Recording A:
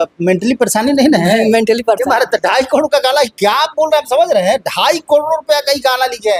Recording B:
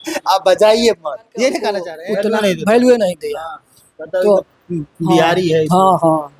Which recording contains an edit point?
B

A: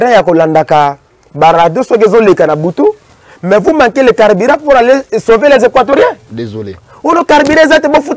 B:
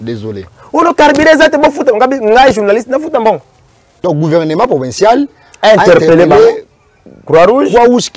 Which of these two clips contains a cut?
B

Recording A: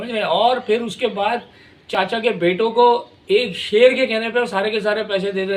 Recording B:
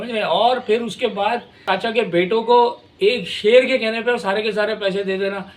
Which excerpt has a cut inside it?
B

